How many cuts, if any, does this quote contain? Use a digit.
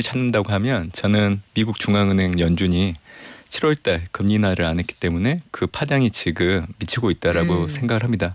0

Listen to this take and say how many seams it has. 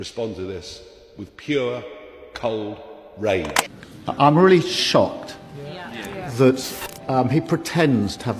1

